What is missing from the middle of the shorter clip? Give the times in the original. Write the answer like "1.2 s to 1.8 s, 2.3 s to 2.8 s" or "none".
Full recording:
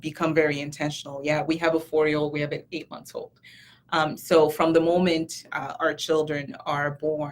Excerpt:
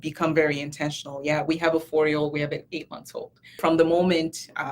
3.6 s to 4.5 s